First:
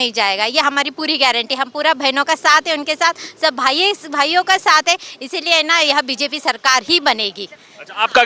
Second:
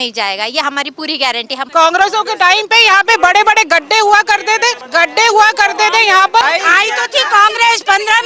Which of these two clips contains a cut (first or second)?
second